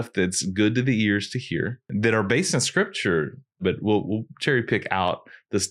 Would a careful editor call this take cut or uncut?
cut